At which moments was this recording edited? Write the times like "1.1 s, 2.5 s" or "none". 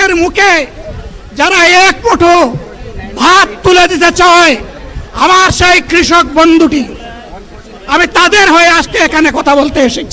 none